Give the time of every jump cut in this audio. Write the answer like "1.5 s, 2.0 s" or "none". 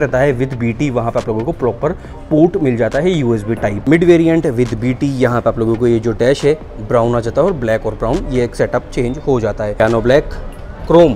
3.7 s, 9.8 s